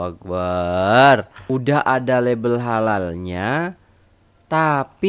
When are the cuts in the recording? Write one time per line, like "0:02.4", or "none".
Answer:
0:01.3